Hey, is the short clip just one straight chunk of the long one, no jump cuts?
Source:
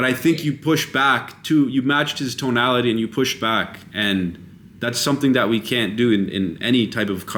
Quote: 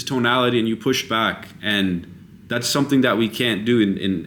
yes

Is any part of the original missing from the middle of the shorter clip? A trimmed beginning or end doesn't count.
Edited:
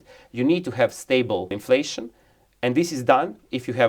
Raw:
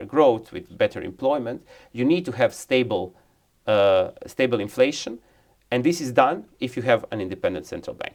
yes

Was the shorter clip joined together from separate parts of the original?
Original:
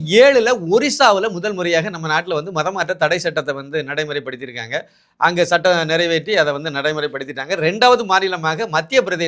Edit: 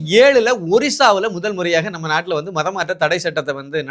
no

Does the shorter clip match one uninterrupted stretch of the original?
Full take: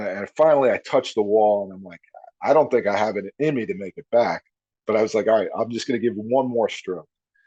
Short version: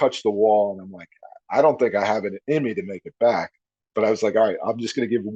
yes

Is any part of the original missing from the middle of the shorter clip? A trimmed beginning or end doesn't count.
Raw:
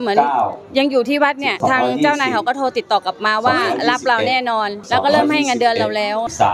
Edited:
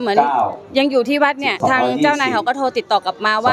no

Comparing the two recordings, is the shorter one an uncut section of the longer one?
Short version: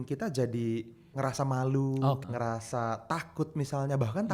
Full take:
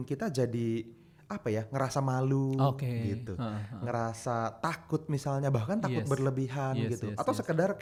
no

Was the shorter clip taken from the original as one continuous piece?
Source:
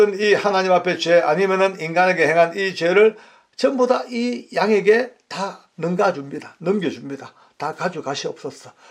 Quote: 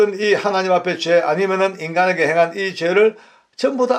yes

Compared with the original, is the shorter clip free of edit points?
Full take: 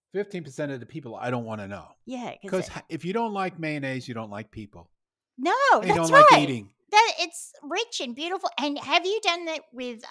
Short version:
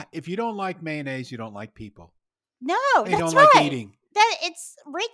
yes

